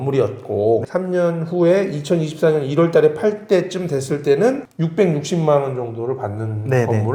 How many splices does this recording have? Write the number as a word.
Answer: zero